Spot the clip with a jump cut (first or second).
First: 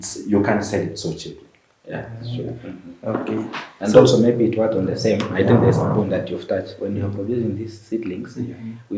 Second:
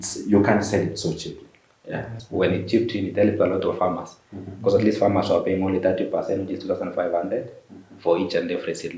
second